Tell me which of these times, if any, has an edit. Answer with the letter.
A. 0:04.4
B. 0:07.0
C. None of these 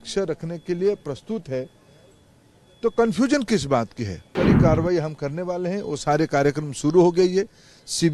A